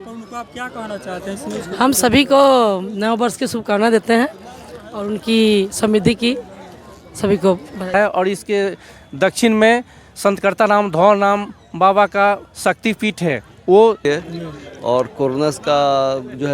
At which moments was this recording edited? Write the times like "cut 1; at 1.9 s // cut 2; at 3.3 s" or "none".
cut 1; at 7.9 s // cut 2; at 14.0 s